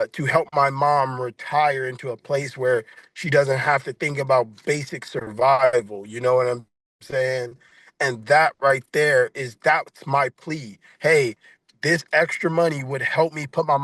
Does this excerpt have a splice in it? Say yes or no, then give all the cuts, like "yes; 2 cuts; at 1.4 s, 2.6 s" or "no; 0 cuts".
no; 0 cuts